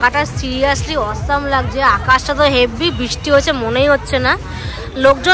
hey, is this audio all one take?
yes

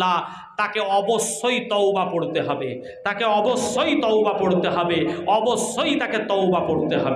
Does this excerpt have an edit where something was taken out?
no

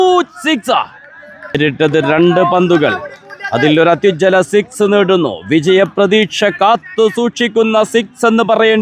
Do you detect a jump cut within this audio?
yes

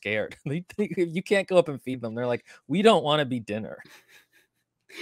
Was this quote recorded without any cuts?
no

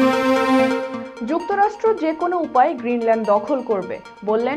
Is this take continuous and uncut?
no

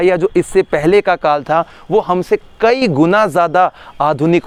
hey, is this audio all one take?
yes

